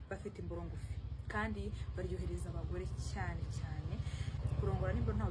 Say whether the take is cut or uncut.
cut